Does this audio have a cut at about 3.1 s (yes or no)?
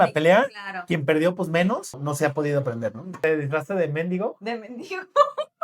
yes